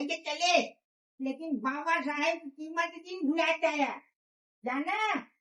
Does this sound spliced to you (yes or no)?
no